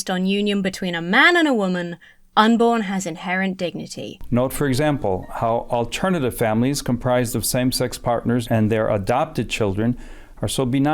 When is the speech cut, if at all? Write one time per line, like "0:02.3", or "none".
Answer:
0:04.1